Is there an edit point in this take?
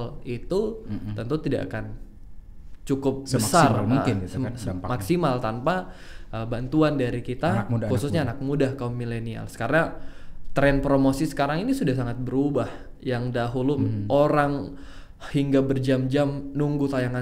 no; 0 cuts

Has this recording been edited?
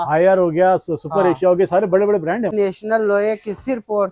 yes; 1 cut; at 2.5 s

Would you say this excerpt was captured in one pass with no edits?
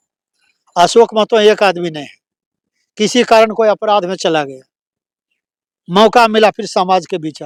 yes; 0 cuts

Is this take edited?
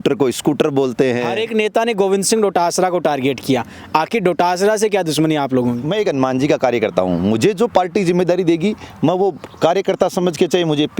yes; 2 cuts; at 1.4 s, 5.8 s

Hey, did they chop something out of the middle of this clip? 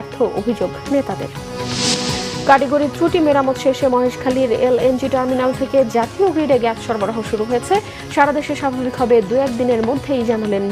no; 0 cuts

